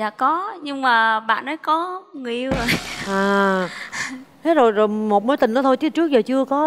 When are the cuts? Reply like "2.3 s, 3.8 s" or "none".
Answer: none